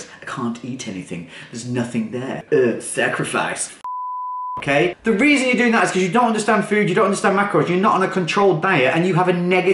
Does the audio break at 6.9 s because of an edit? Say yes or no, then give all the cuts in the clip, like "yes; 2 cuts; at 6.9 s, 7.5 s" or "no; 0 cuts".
no; 1 cut; at 2.4 s